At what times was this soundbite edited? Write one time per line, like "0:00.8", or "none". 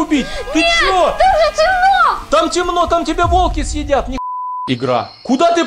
0:04.5